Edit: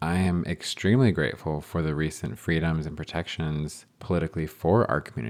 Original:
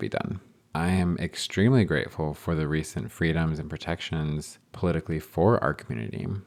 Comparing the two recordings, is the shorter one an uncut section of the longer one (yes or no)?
yes